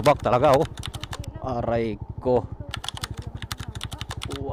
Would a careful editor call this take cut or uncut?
uncut